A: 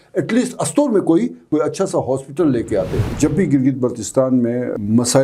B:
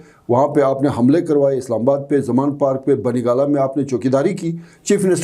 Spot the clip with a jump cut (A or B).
A